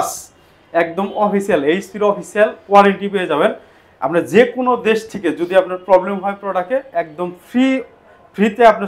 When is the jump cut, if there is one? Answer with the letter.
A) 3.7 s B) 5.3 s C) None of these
C